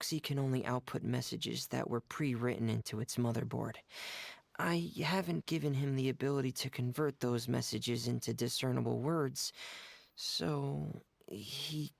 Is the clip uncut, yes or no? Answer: yes